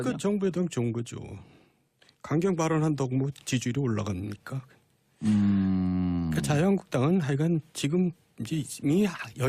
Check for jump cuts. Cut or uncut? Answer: cut